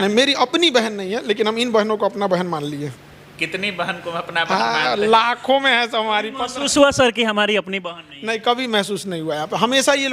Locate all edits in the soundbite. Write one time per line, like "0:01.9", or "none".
none